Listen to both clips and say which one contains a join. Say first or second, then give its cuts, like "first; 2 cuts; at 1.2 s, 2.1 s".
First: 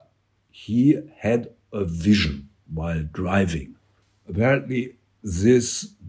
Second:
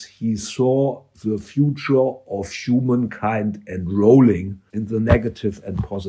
second; 2 cuts; at 1.1 s, 4.6 s